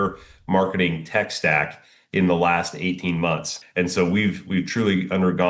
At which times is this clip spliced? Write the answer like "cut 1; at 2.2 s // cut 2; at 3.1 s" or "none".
cut 1; at 3.5 s